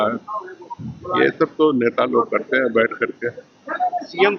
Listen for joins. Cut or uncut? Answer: uncut